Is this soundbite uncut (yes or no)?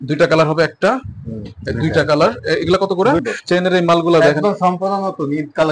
no